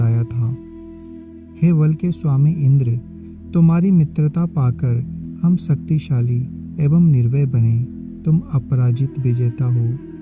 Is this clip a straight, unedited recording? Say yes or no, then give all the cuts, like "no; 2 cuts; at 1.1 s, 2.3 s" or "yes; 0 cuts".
yes; 0 cuts